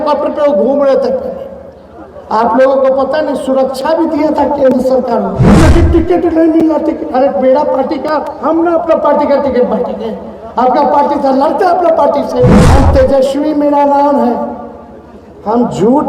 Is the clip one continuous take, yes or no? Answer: no